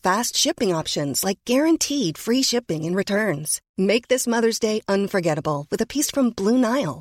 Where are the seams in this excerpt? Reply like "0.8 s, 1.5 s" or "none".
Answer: none